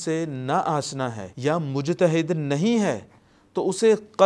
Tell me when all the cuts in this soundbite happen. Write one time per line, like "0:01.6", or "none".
0:01.3